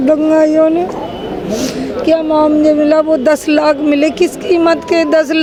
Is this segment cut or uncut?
uncut